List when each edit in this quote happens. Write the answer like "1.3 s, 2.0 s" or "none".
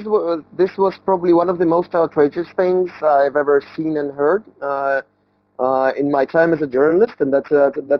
none

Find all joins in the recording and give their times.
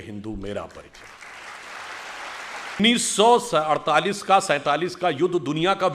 2.8 s

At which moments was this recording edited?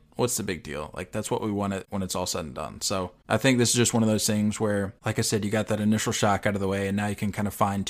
1.9 s, 3.2 s, 5.0 s

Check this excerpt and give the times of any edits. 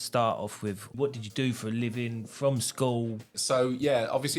0.9 s, 3.4 s

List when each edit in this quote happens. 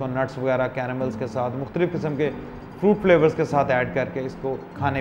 none

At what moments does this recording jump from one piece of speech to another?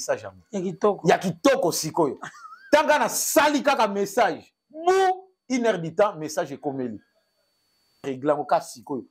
8.0 s

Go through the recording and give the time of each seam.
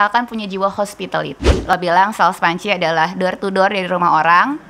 1.8 s

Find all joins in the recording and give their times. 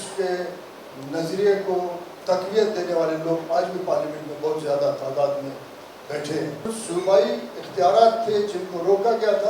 6.8 s

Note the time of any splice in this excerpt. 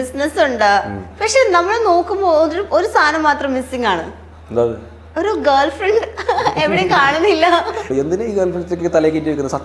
7.9 s

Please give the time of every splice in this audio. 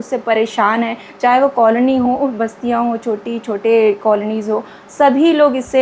none

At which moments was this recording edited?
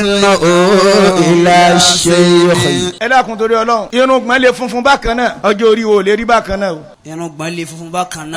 3.0 s, 3.9 s, 5.4 s, 7.0 s

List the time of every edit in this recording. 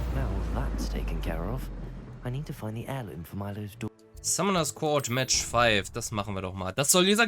4.0 s

